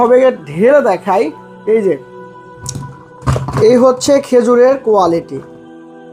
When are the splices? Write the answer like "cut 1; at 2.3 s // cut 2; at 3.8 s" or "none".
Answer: cut 1; at 2.7 s